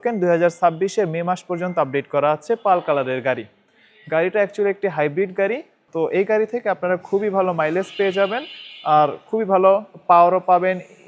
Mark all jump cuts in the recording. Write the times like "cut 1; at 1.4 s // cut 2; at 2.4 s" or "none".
none